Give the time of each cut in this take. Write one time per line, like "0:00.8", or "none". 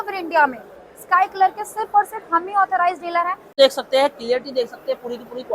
0:03.5